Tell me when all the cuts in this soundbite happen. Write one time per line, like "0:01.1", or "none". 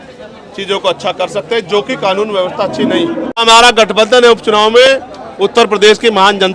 0:03.4